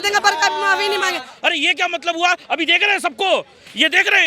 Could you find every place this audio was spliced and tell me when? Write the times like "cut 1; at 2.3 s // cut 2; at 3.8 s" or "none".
cut 1; at 1.3 s